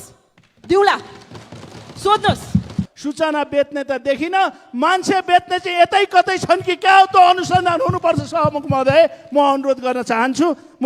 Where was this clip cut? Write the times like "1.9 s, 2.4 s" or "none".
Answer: 2.8 s